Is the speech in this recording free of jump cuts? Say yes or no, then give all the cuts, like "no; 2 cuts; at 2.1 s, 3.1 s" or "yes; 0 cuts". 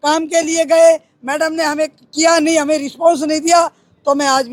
yes; 0 cuts